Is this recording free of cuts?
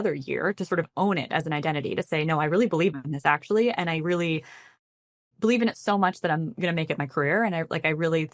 yes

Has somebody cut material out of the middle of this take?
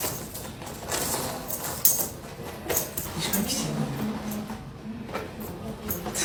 no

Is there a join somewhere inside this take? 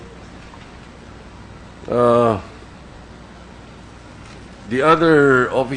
yes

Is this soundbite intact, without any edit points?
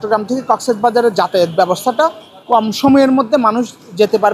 yes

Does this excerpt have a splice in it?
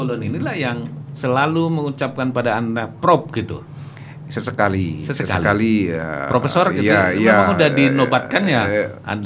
no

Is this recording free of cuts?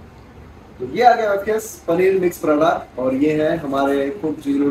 yes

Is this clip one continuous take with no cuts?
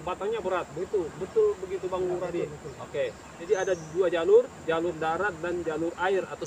no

